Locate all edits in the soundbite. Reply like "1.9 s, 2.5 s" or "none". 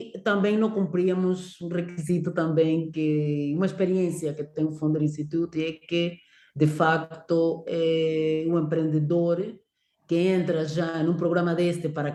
none